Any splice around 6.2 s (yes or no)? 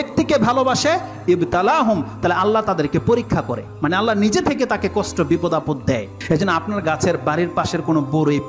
yes